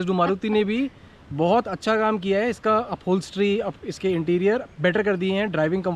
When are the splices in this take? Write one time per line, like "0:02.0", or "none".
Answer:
none